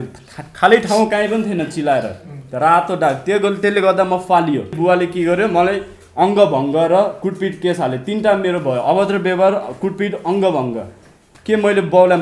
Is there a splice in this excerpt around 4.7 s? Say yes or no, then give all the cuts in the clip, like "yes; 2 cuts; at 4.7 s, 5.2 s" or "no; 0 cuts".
yes; 1 cut; at 4.7 s